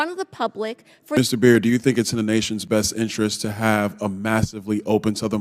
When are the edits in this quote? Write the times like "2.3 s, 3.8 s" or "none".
1.2 s